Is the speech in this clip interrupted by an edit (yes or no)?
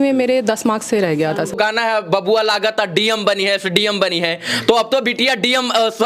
yes